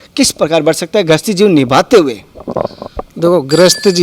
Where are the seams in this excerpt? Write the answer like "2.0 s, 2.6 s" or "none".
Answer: none